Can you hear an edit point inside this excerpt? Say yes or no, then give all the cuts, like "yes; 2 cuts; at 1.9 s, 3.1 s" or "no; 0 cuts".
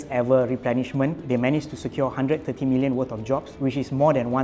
yes; 2 cuts; at 1.2 s, 3.5 s